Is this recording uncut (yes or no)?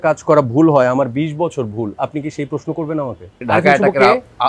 no